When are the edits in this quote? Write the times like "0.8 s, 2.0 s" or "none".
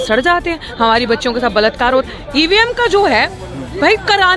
2.0 s